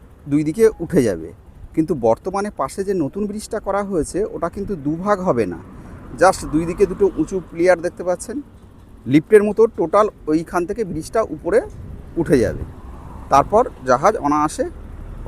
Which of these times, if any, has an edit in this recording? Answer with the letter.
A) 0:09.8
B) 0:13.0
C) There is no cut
C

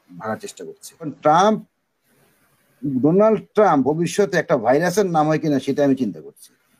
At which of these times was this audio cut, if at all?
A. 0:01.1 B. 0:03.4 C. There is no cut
A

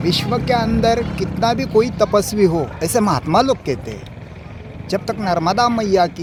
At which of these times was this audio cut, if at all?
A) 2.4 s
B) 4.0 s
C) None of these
C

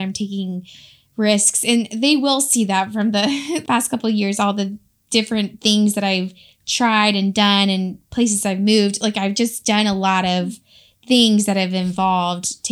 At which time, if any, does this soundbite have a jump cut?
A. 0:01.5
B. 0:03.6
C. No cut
B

